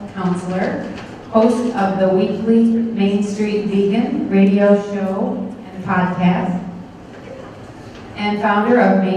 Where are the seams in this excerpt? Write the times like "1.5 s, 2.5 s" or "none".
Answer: 1.1 s